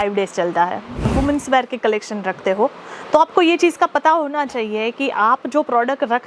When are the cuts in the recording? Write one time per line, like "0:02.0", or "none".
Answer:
0:01.1